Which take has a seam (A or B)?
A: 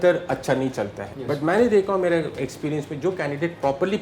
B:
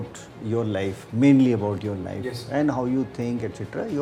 A